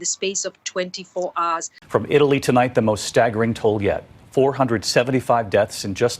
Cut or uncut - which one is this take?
cut